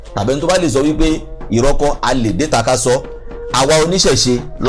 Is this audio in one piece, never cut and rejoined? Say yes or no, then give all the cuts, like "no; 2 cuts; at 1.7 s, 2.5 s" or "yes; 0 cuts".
yes; 0 cuts